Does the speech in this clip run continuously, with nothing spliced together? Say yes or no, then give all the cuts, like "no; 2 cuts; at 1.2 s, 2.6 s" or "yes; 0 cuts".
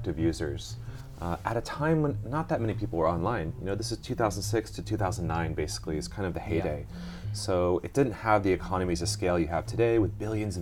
yes; 0 cuts